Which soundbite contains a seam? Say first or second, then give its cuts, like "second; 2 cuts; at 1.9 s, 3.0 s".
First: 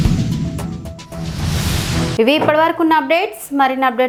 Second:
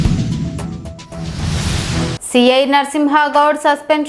second; 1 cut; at 2.1 s